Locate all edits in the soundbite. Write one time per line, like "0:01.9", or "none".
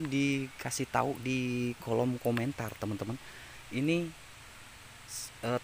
none